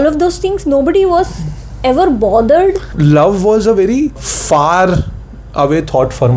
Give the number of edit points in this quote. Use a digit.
2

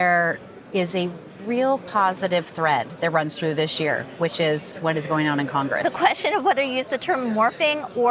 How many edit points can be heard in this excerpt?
1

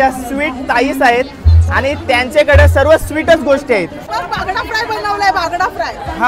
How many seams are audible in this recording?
1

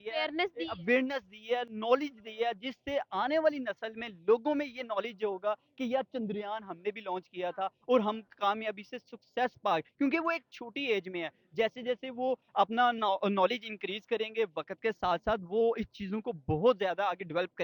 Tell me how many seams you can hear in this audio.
0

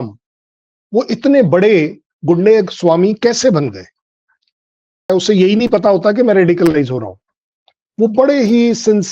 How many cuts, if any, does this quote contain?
1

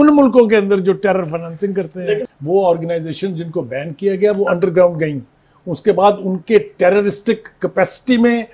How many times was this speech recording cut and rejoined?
1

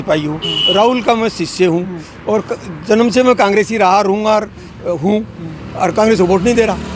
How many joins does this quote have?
0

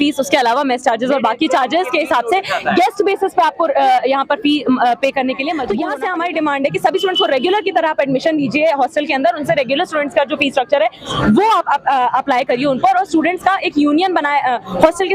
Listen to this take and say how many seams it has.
1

